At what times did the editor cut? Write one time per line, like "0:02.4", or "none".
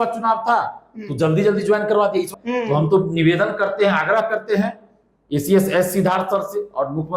0:02.3